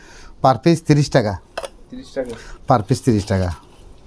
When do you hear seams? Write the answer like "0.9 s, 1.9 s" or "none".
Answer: none